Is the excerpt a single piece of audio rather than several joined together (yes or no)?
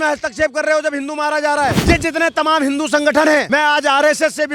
no